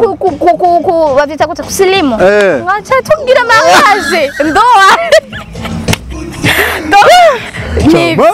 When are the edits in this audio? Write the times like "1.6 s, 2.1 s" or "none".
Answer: none